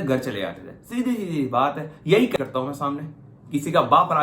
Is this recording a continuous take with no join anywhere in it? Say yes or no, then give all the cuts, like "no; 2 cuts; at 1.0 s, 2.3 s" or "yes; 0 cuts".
no; 1 cut; at 2.4 s